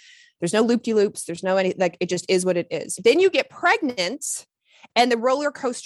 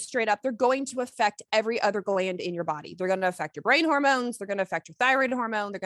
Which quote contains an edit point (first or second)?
first